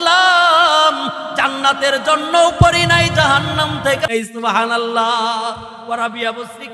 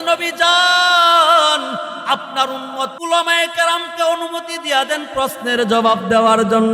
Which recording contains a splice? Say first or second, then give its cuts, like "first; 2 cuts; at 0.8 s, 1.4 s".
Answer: second; 1 cut; at 3.0 s